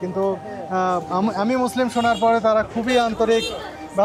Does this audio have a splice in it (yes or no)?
no